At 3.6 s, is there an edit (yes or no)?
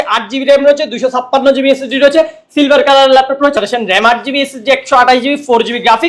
yes